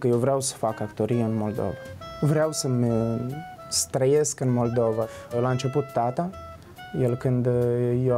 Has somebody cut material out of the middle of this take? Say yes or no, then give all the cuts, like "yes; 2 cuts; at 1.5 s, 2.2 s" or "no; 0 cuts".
yes; 1 cut; at 5.4 s